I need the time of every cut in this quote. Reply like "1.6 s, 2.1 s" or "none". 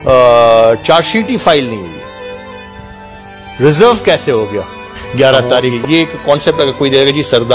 5.8 s